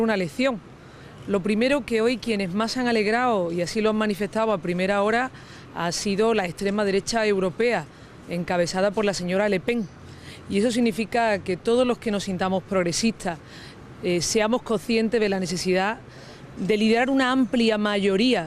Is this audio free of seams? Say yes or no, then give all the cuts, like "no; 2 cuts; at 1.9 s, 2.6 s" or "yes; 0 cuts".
no; 1 cut; at 16.0 s